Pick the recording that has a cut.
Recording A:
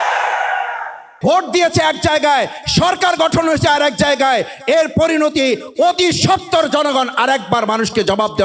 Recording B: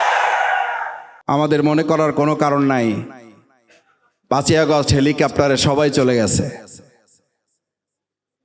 A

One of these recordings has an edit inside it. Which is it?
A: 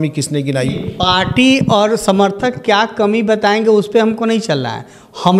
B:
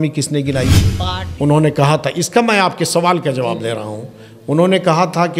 B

